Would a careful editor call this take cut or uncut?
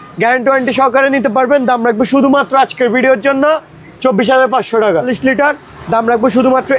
cut